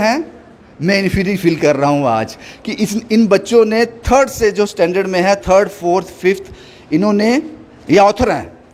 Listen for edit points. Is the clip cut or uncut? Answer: uncut